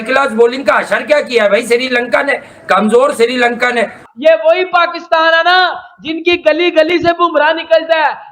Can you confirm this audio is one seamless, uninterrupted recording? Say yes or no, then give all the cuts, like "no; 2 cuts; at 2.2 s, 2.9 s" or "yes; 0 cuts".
no; 1 cut; at 4.0 s